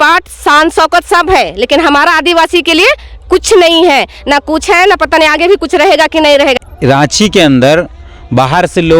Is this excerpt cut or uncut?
cut